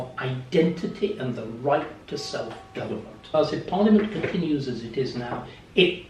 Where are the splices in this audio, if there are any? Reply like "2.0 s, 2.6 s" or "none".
3.2 s